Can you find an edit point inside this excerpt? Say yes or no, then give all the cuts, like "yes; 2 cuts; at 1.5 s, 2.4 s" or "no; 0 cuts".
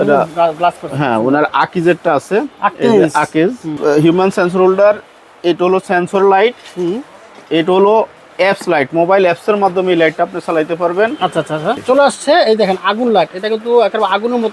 yes; 2 cuts; at 3.8 s, 11.8 s